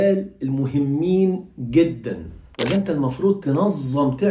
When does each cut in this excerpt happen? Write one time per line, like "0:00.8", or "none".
0:02.4

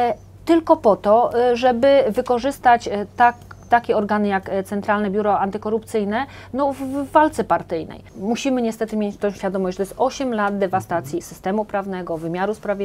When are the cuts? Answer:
0:08.1

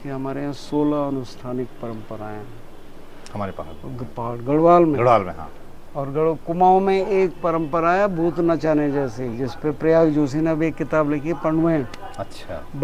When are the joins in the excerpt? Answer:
none

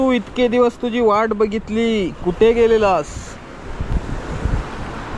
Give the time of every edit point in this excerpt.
none

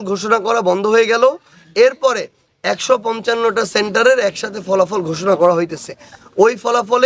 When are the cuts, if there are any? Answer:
none

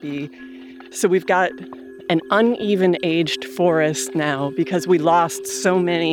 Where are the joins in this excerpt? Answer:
0:00.8
0:02.0

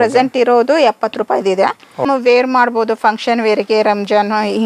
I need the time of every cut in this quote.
0:02.0

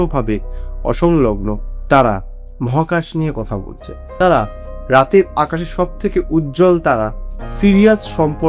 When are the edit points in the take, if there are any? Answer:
none

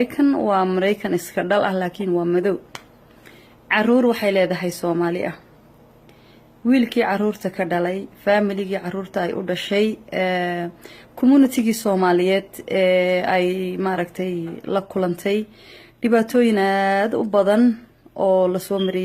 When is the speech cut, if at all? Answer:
0:17.3

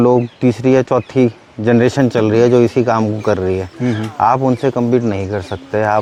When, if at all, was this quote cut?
none

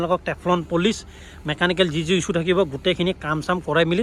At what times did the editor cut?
none

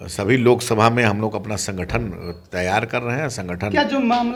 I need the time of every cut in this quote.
none

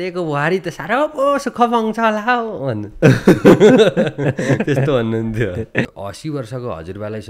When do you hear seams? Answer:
0:05.9

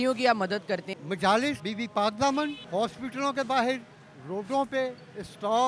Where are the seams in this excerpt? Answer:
0:00.9
0:01.6
0:02.6

